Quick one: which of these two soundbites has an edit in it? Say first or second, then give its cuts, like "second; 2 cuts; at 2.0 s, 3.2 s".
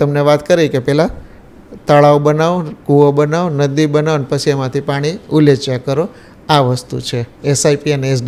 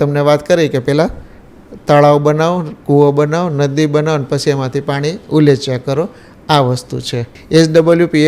second; 1 cut; at 7.4 s